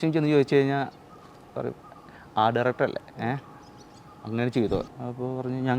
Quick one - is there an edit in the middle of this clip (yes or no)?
yes